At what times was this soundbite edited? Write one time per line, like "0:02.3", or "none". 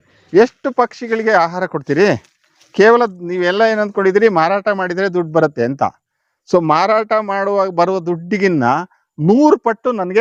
none